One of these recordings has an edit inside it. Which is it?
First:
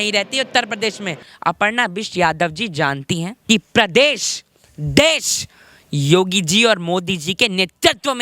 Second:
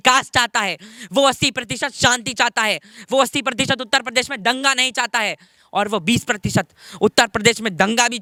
first; 2 cuts; at 1.3 s, 3.3 s

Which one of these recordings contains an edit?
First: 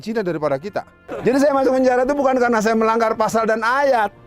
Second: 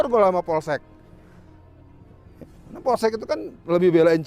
first; 1 cut; at 1.0 s

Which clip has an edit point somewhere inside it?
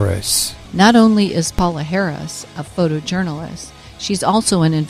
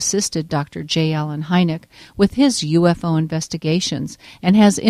first; 1 cut; at 2.0 s

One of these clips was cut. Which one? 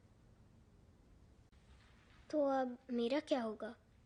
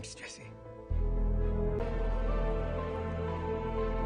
second; 1 cut; at 1.8 s

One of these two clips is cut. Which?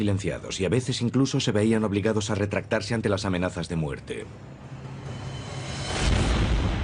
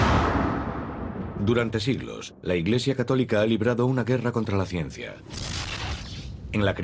first; 1 cut; at 2.9 s

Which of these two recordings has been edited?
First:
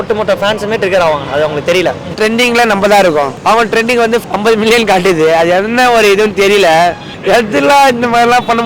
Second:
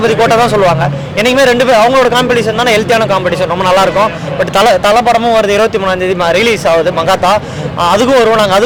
first; 4 cuts; at 2.2 s, 3.4 s, 4.3 s, 7.1 s

